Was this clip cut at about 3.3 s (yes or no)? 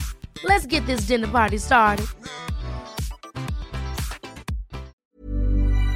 no